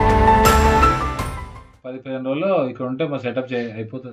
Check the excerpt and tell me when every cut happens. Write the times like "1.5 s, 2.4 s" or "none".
none